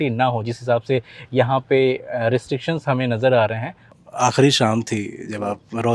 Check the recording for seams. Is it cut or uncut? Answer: cut